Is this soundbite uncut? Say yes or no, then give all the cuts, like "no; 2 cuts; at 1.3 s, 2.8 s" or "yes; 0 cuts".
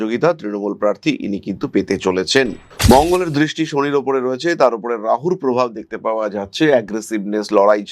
no; 1 cut; at 2.6 s